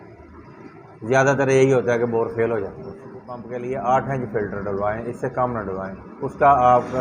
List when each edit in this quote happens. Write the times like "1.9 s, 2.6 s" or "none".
3.4 s